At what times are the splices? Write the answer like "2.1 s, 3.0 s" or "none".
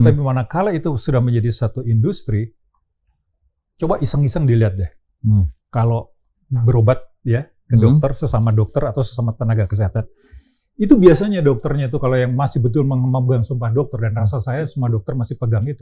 none